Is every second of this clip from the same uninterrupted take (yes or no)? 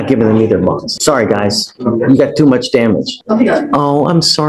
no